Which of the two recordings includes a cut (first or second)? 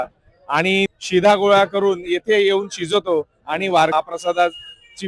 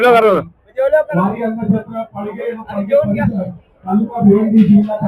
first